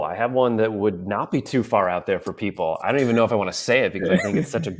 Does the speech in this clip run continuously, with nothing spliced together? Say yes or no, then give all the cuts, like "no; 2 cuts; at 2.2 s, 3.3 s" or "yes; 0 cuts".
yes; 0 cuts